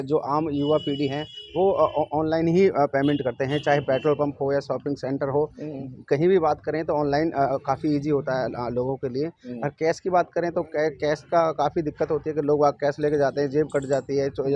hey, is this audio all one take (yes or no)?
yes